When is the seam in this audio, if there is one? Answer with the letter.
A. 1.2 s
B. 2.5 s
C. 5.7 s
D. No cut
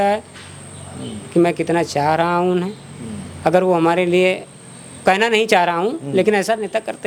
D